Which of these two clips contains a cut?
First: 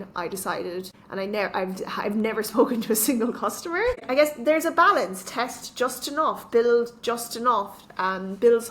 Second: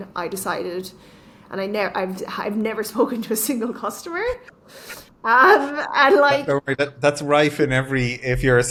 first; 2 cuts; at 1.0 s, 4.0 s

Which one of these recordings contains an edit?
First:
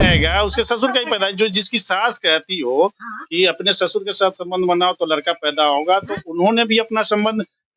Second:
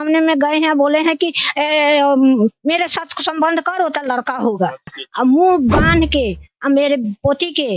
second; 1 cut; at 4.9 s

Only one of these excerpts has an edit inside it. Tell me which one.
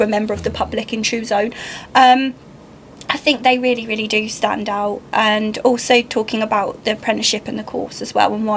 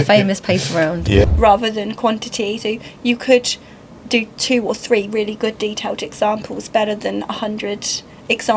second; 1 cut; at 1.2 s

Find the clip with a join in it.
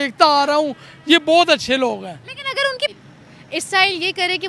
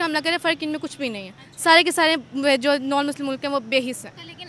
first; 1 cut; at 2.9 s

